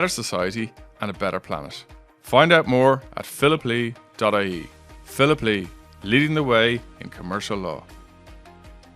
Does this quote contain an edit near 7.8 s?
yes; 1 cut; at 7.8 s

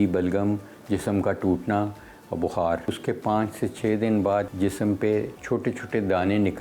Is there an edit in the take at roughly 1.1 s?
no; 3 cuts; at 3.0 s, 4.5 s, 5.4 s

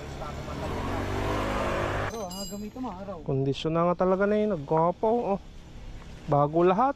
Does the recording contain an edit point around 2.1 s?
yes; 1 cut; at 2.1 s

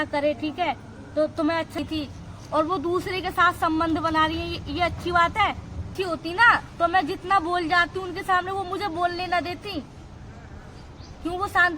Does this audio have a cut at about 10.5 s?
no; 2 cuts; at 1.8 s, 5.9 s

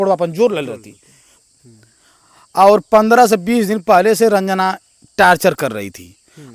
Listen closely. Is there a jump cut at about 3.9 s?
no; 1 cut; at 1.4 s

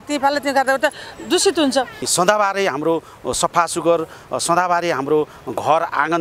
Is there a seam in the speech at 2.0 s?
yes; 1 cut; at 2.0 s

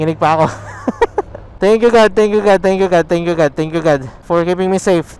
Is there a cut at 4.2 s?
no; 0 cuts

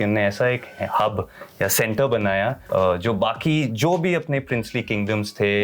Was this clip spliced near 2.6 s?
yes; 1 cut; at 2.6 s

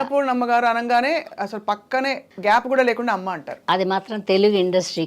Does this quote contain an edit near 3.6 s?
no; 1 cut; at 2.3 s

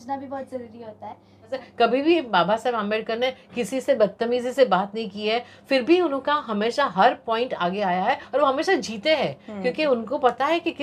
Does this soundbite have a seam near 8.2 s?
no; 1 cut; at 1.6 s

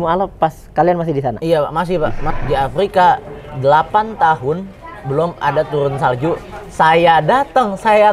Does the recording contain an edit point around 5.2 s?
no; 1 cut; at 2.3 s

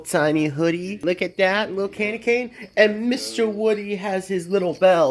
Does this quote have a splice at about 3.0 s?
no; 0 cuts

